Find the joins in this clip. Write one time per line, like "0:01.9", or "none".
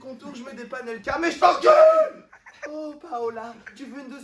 none

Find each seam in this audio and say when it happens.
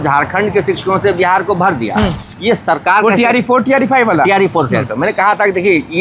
0:02.3

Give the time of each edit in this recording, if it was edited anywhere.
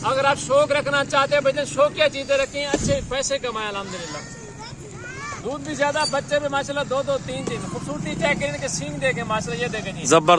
none

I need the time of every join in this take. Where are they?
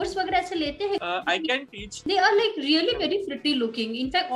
0:02.0

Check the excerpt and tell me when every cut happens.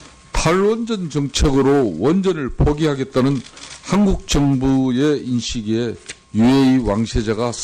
0:02.2

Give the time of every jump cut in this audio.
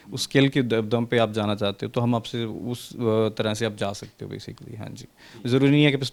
none

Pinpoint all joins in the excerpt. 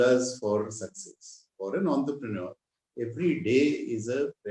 0:01.5

